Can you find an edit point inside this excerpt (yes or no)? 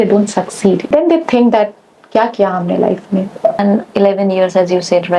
yes